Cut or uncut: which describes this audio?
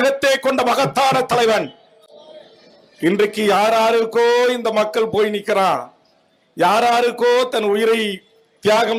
uncut